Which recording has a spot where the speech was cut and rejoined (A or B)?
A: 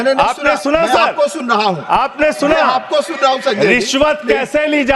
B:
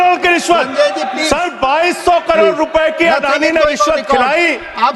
B